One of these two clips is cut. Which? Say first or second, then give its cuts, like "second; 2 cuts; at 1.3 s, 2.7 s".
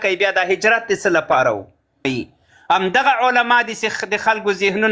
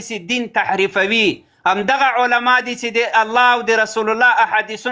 first; 1 cut; at 2.1 s